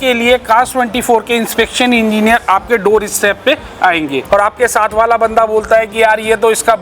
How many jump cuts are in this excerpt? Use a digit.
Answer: 1